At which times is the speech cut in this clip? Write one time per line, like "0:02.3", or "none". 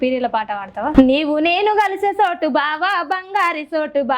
0:00.9